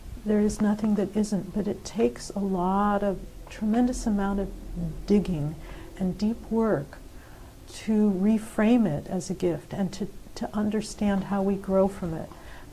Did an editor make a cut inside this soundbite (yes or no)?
no